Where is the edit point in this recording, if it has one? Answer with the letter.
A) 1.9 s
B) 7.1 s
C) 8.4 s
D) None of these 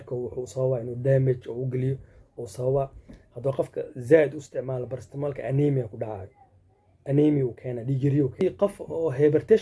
C